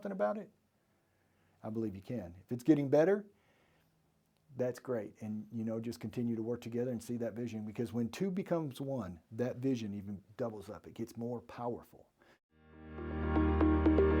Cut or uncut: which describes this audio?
cut